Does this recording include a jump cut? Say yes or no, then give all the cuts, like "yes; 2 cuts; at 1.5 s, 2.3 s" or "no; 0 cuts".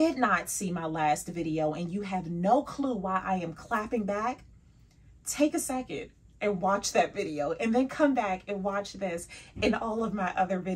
no; 0 cuts